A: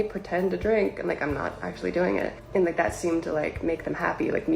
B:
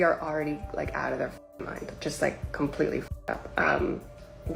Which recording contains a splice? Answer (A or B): A